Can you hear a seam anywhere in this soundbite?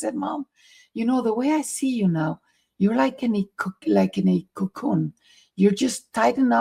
no; 0 cuts

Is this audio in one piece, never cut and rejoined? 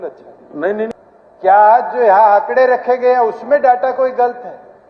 no; 1 cut; at 1.0 s

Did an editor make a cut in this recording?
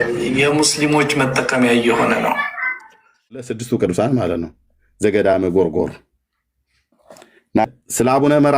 yes; 2 cuts; at 3.5 s, 7.6 s

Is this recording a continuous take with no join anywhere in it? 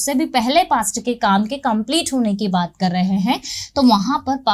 yes; 0 cuts

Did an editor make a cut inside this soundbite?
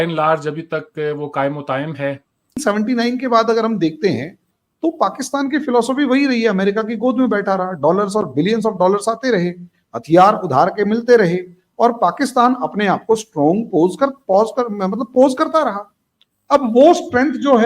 yes; 1 cut; at 2.6 s

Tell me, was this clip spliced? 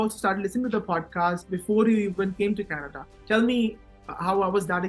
no; 0 cuts

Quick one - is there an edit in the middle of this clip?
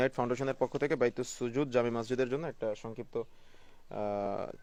no; 0 cuts

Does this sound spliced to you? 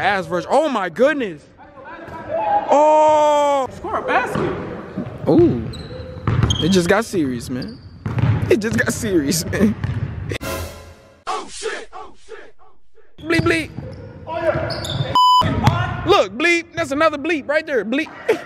yes; 3 cuts; at 3.7 s, 10.4 s, 13.1 s

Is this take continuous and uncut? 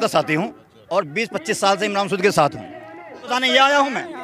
no; 1 cut; at 3.2 s

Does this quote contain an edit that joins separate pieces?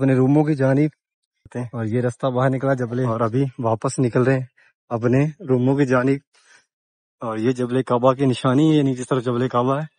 yes; 1 cut; at 3.1 s

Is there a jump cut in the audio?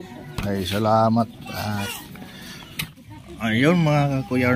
yes; 1 cut; at 2.9 s

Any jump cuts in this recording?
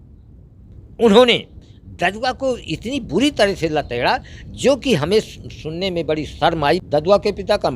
yes; 1 cut; at 6.8 s

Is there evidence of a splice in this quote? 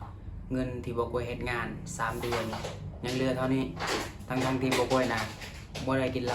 no; 0 cuts

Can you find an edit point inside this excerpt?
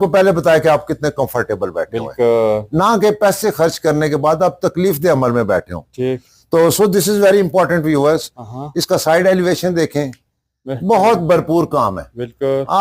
no; 0 cuts

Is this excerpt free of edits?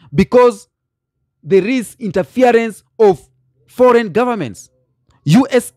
yes; 0 cuts

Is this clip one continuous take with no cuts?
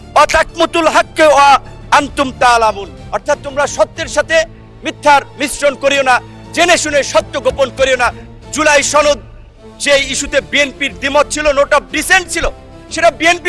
no; 1 cut; at 8.3 s

